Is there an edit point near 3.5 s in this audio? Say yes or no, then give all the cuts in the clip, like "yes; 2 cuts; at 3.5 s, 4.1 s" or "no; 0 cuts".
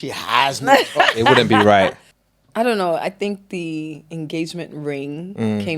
no; 1 cut; at 2.1 s